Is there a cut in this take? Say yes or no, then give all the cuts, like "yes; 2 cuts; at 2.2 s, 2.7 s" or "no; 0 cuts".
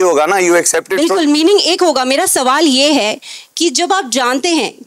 no; 0 cuts